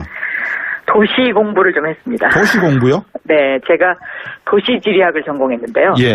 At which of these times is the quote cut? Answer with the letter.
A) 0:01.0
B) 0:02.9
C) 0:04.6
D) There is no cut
C